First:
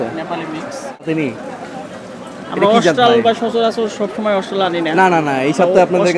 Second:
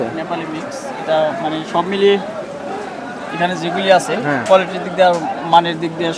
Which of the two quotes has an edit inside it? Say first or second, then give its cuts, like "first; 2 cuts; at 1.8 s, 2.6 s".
first; 1 cut; at 1.0 s